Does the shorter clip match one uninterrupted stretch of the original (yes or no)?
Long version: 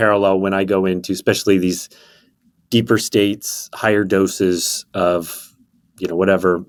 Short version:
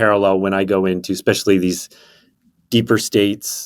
yes